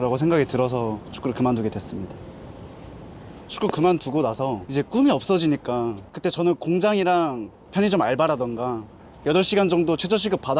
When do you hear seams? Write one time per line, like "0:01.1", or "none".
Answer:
0:02.1
0:03.5
0:04.6
0:06.1